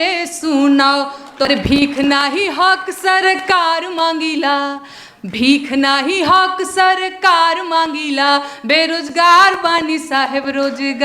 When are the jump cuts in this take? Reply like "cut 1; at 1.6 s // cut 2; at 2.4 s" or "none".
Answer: cut 1; at 1.5 s